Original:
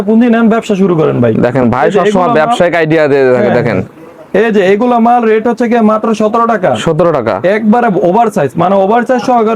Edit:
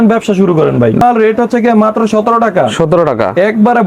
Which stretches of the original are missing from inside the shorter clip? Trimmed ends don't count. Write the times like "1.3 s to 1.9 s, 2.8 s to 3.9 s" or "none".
1.4 s to 5.1 s